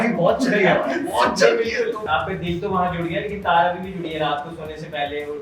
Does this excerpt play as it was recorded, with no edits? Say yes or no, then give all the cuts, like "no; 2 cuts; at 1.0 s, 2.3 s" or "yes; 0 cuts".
no; 1 cut; at 2.0 s